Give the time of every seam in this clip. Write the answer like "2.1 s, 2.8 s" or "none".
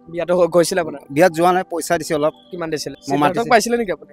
2.9 s